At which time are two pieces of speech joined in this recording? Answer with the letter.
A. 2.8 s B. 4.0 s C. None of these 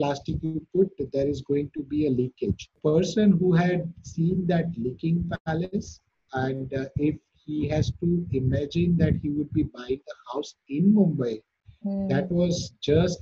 A